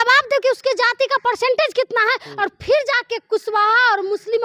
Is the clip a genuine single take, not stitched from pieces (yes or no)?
yes